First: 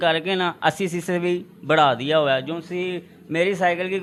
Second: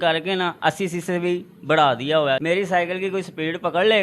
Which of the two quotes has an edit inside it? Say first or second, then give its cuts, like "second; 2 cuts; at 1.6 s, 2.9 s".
second; 1 cut; at 2.4 s